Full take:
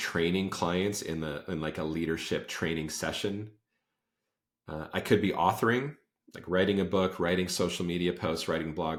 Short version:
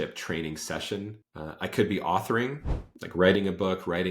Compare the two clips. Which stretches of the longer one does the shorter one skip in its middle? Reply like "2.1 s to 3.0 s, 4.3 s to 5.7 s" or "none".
3.6 s to 4.6 s